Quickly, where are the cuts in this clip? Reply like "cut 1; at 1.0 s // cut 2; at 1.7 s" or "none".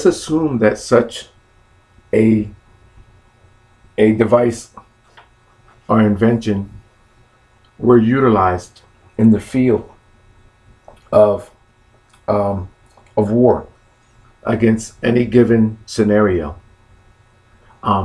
cut 1; at 11.5 s